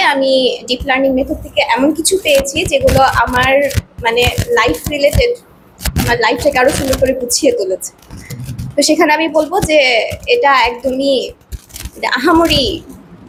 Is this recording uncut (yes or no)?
yes